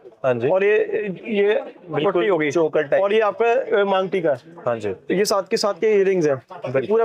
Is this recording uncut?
yes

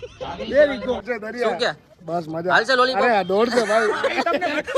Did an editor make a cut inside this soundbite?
yes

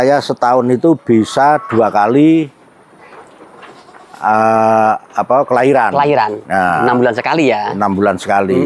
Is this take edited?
no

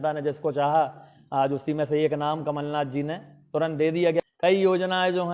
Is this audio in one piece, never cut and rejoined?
no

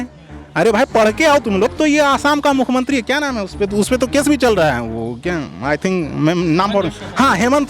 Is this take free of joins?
no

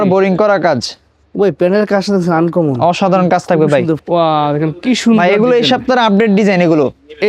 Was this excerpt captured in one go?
no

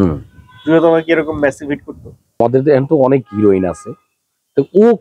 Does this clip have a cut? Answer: yes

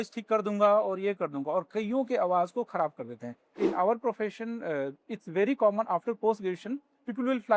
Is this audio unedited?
no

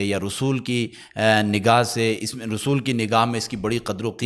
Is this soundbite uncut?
yes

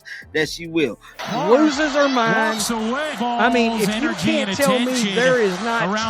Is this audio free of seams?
no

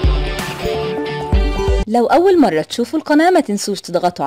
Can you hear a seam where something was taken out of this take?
yes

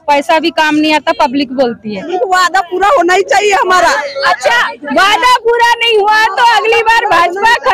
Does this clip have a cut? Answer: yes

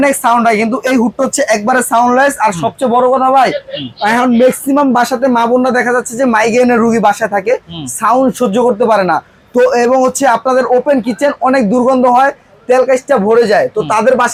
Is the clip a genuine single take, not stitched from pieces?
yes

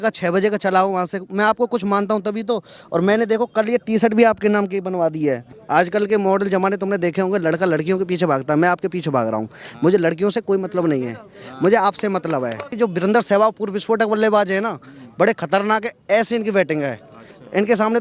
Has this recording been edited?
yes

